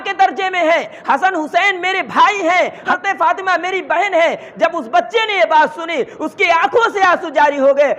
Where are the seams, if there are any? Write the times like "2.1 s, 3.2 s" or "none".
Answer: 2.9 s